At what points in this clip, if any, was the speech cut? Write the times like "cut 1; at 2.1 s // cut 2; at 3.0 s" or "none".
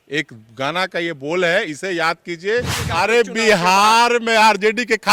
cut 1; at 2.8 s